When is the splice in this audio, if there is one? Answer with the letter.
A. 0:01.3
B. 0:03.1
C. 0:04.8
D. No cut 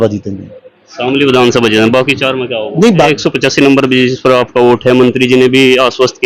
B